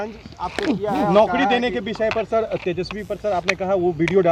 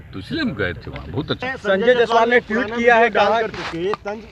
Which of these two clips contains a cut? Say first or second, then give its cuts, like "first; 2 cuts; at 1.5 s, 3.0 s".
second; 1 cut; at 1.4 s